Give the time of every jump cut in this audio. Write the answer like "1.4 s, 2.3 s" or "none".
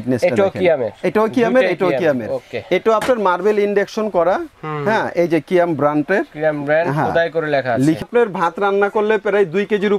8.0 s